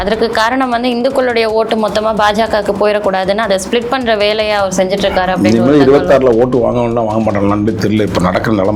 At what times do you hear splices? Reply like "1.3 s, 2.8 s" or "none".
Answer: none